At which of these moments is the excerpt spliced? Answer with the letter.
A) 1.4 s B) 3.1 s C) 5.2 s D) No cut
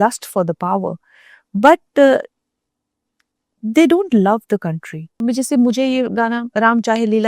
C